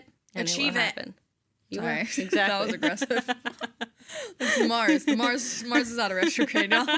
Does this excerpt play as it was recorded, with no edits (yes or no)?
yes